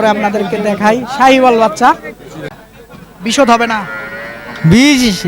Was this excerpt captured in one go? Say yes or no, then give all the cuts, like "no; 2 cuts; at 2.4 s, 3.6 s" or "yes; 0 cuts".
no; 1 cut; at 2.5 s